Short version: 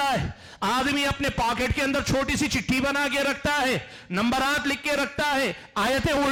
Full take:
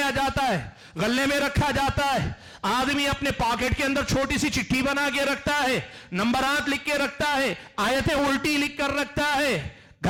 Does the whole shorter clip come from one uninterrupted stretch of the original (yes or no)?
yes